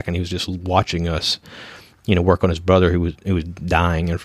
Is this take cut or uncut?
uncut